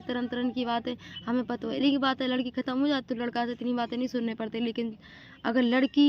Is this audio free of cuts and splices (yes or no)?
yes